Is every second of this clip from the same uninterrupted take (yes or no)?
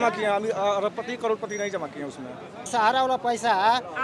no